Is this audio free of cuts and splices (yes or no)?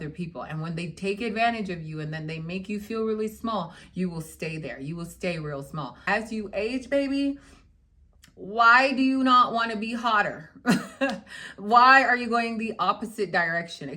no